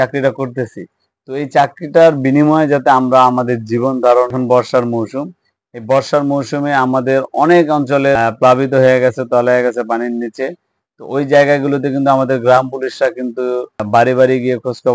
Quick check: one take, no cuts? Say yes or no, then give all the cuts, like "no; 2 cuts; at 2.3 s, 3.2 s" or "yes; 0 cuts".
no; 3 cuts; at 4.3 s, 8.2 s, 13.8 s